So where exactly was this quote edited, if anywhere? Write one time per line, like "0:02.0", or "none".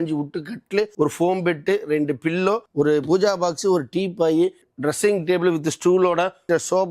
0:00.9
0:02.7
0:04.6